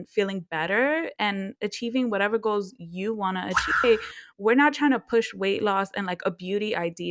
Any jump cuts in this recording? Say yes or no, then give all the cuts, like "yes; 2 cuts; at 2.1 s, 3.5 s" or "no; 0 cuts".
yes; 1 cut; at 3.8 s